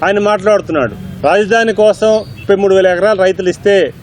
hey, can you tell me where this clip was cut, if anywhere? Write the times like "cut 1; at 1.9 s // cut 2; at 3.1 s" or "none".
cut 1; at 1.0 s // cut 2; at 2.3 s